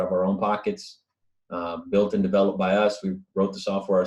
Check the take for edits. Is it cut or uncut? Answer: uncut